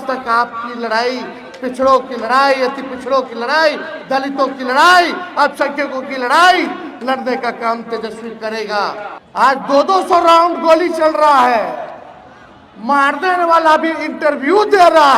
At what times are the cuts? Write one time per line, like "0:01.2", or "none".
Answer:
0:09.2

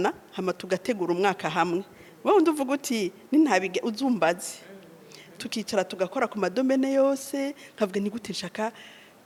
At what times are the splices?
none

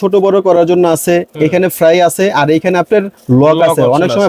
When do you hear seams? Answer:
none

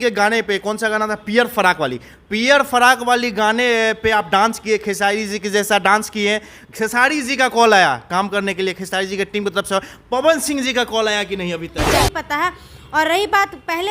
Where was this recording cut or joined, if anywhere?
0:11.9

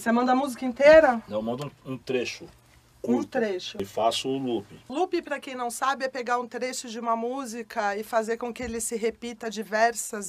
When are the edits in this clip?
0:05.5

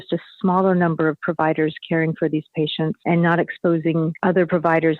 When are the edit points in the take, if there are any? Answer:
0:03.0
0:04.1

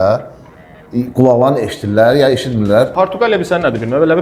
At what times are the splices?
0:02.9

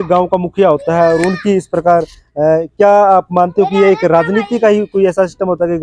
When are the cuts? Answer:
none

